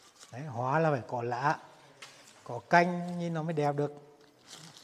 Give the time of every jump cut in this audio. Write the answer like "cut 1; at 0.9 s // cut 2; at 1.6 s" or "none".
none